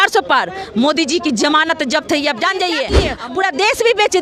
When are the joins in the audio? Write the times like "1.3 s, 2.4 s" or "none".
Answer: 3.1 s